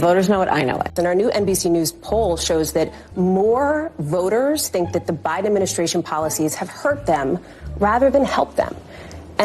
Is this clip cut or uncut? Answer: cut